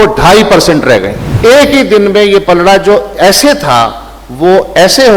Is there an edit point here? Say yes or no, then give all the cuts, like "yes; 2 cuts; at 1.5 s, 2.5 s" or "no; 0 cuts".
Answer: yes; 1 cut; at 1.2 s